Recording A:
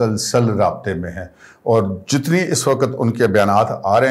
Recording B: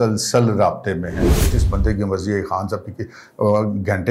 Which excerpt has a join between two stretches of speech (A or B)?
B